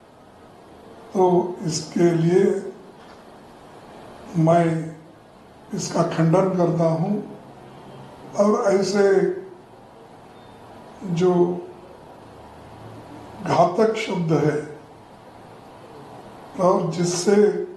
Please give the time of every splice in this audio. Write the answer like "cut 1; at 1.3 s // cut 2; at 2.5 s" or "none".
none